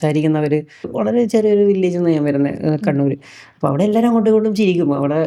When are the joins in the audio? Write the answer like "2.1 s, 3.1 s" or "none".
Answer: 0.9 s